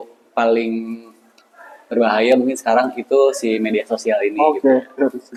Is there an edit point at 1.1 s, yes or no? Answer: no